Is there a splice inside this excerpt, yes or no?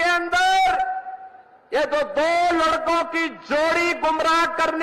no